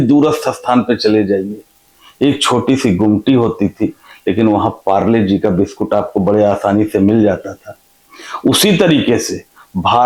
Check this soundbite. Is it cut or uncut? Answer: uncut